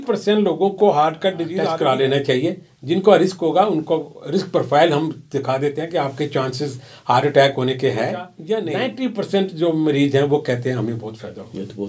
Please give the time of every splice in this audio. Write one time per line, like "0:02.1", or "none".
0:01.5
0:08.6